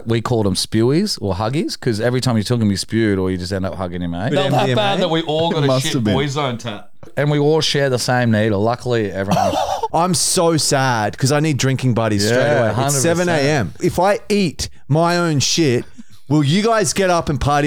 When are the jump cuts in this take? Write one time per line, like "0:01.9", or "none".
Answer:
0:04.3
0:07.1
0:09.9
0:13.8